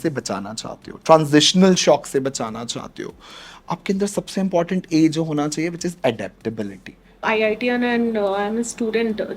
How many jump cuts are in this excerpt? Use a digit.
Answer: 1